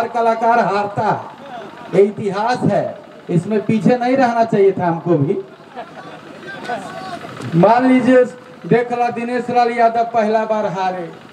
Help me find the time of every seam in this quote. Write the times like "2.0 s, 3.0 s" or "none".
none

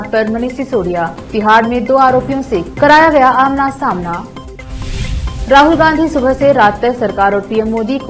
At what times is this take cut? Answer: none

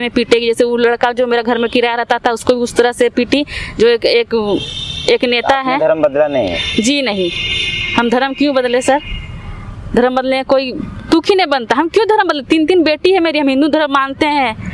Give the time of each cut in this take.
none

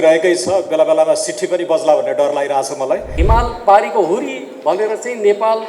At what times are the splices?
3.1 s

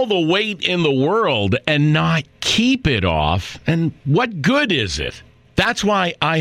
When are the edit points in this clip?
none

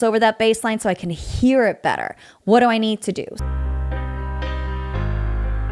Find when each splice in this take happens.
3.4 s

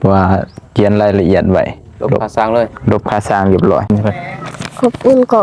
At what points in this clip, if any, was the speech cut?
3.9 s

